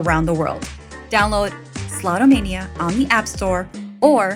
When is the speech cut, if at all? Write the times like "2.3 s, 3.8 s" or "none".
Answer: 1.6 s